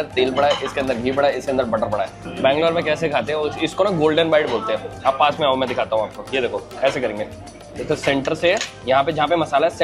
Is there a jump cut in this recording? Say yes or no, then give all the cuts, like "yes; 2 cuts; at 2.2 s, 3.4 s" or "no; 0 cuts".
no; 0 cuts